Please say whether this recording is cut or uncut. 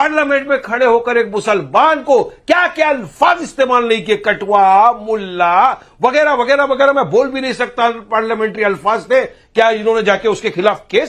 uncut